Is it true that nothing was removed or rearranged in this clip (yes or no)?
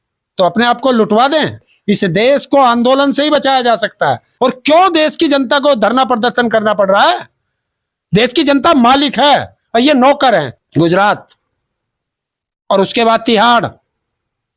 no